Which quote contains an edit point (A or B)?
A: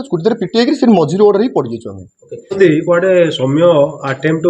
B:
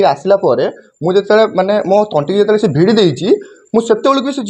A